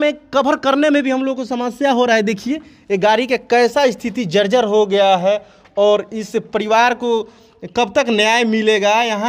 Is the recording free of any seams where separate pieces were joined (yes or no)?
yes